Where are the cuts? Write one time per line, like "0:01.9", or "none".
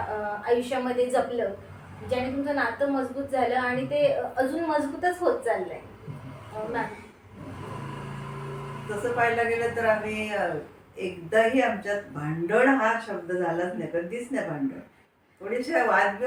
none